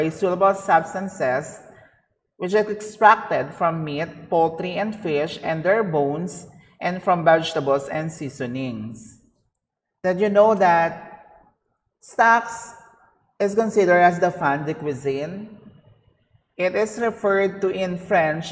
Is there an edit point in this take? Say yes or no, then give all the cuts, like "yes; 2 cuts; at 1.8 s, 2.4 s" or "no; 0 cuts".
no; 0 cuts